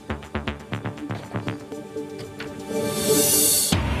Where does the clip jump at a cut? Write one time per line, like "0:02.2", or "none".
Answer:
none